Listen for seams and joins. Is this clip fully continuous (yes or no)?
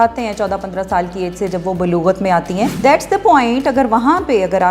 no